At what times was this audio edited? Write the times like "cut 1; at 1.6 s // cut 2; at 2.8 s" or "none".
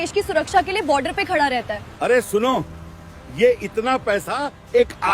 cut 1; at 1.8 s